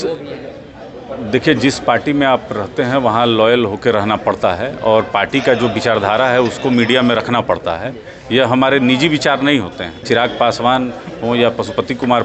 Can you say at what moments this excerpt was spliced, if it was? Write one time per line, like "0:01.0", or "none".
0:09.9

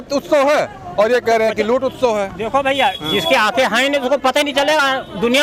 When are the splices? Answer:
none

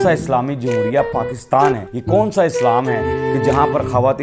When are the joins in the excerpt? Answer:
0:01.9

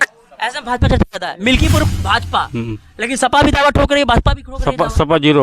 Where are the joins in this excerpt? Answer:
0:01.8

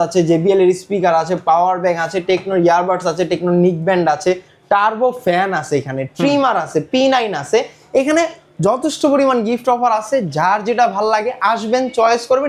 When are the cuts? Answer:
none

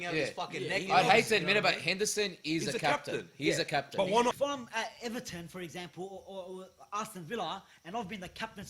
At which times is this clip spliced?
0:04.3

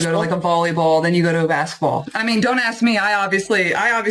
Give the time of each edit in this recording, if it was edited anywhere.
0:02.1

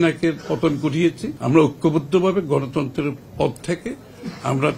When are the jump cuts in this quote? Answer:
0:01.3

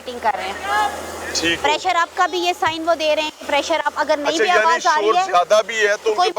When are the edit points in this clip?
none

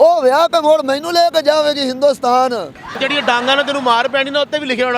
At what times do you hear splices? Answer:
0:03.0

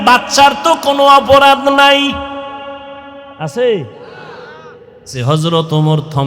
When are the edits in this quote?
0:05.1

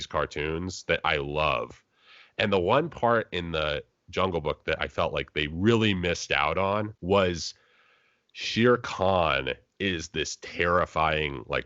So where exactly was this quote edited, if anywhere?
0:07.0

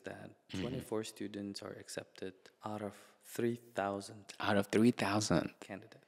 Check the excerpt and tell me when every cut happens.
0:02.5

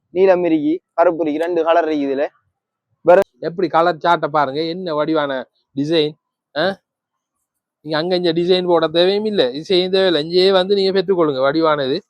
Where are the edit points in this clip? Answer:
0:03.2

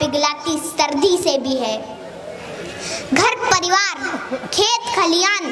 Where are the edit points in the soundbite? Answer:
none

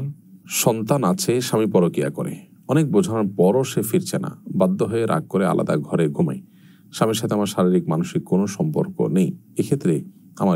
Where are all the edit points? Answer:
none

